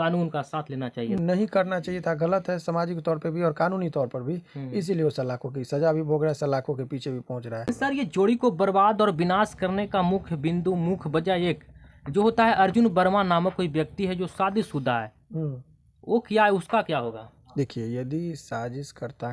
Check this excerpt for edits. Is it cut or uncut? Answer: cut